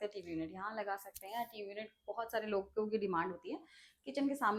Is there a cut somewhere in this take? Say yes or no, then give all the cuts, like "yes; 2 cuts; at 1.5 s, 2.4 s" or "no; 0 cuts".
no; 0 cuts